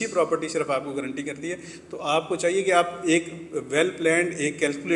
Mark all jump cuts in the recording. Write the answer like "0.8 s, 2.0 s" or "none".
none